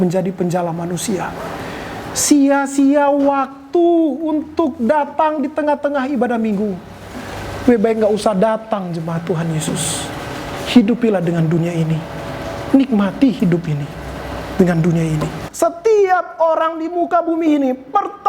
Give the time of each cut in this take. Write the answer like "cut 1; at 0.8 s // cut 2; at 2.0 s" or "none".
cut 1; at 15.4 s